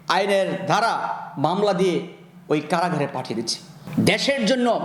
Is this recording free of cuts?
no; 1 cut; at 3.7 s

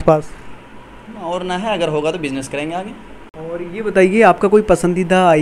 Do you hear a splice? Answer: no; 0 cuts

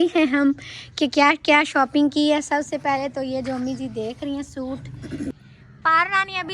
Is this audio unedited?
no; 1 cut; at 5.3 s

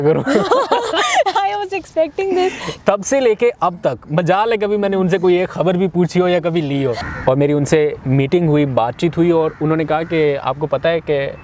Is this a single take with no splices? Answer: no; 2 cuts; at 2.8 s, 7.1 s

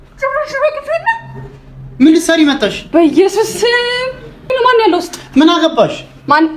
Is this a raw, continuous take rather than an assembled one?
no; 1 cut; at 4.5 s

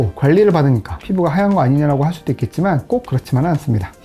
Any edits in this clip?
no; 0 cuts

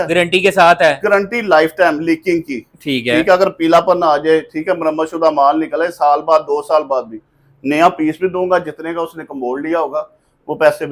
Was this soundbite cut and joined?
no; 0 cuts

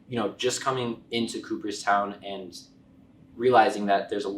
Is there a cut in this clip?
no; 0 cuts

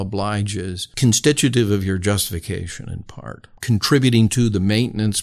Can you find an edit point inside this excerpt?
yes; 2 cuts; at 0.8 s, 3.5 s

